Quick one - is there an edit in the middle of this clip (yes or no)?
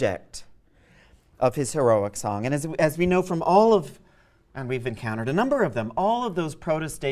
yes